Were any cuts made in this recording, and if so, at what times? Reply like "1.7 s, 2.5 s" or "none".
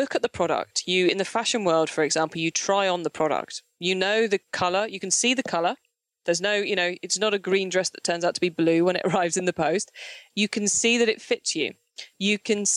10.2 s